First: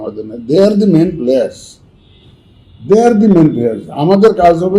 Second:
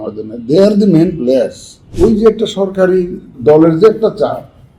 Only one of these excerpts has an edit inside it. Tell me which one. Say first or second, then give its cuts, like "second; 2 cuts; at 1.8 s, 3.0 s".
second; 2 cuts; at 1.8 s, 3.3 s